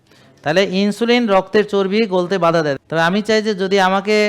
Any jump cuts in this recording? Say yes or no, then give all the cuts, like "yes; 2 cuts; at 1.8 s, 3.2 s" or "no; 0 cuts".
yes; 1 cut; at 2.7 s